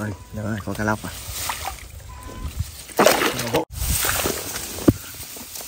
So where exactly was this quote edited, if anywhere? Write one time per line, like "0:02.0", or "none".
0:03.6